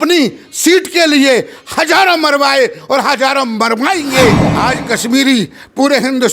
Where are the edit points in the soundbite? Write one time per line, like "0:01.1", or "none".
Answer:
0:04.5